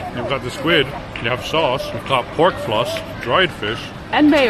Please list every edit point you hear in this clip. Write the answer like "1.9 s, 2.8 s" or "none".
1.0 s, 1.9 s, 3.1 s